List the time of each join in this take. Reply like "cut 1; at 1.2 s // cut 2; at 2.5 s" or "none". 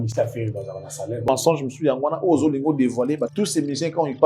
cut 1; at 1.2 s // cut 2; at 3.3 s